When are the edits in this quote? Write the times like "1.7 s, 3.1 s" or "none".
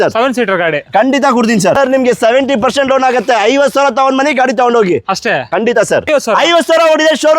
1.7 s, 6.1 s